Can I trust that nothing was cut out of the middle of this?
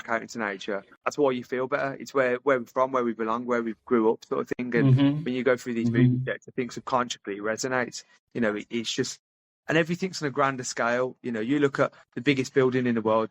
no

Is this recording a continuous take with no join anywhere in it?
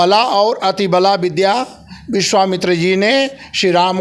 yes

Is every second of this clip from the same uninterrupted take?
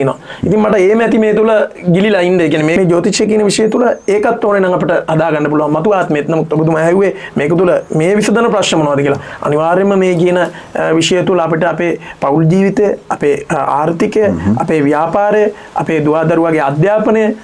no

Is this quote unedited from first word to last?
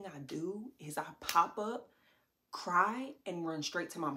yes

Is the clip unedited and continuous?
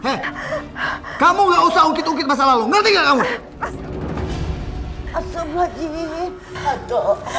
no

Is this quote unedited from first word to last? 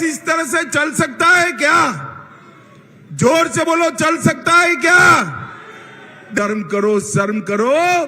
no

